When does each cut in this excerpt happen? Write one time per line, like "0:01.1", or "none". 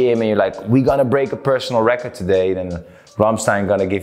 none